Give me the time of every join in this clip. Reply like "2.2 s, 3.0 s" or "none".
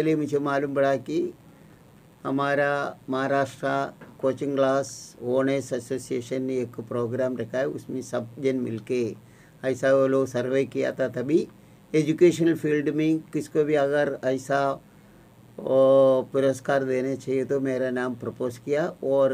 none